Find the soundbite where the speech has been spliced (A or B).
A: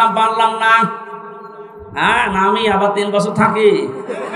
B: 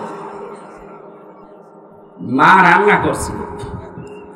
B